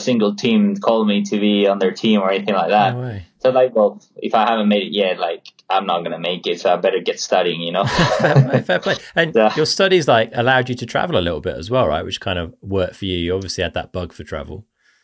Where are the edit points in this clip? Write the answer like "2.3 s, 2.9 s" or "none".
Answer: none